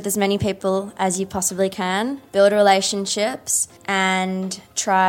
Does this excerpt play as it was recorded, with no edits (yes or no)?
no